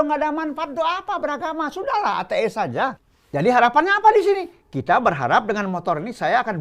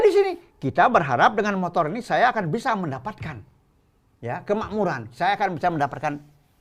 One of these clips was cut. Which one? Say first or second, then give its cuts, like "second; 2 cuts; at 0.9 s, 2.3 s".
first; 1 cut; at 3.1 s